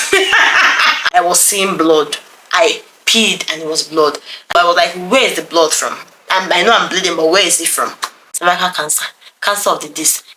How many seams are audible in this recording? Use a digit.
3